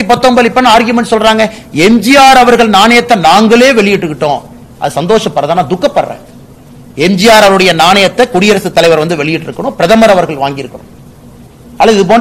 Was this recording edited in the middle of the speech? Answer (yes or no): no